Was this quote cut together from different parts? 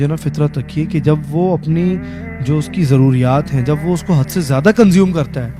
no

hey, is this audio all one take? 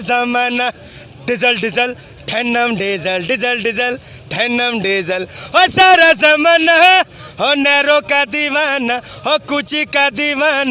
yes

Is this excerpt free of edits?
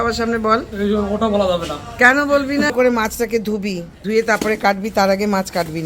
no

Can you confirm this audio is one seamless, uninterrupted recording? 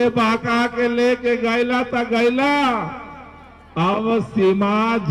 yes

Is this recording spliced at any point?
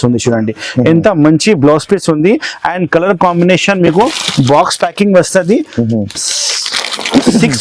no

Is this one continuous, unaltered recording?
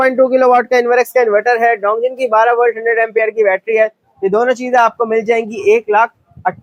yes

